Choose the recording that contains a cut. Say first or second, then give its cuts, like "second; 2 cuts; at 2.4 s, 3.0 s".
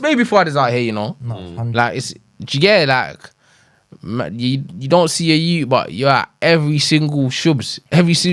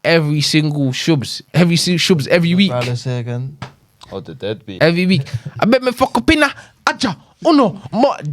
second; 1 cut; at 4.8 s